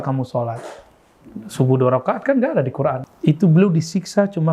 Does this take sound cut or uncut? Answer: cut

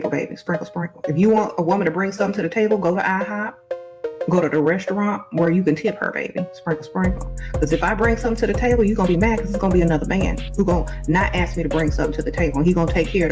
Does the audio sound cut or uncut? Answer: uncut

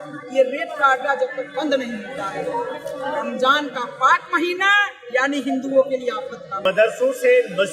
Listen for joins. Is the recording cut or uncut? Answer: cut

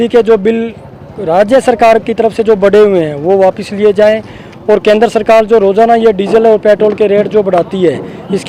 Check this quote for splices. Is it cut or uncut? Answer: uncut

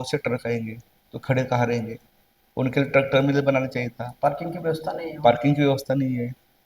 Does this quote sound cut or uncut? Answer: uncut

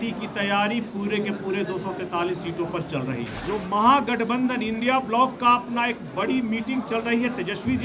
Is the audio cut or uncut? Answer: cut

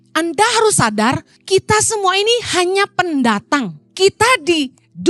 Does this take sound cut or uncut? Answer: cut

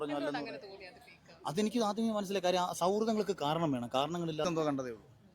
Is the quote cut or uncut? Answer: cut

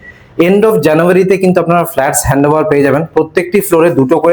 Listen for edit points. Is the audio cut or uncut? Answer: uncut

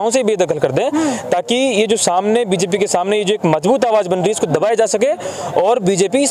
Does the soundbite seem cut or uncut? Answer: uncut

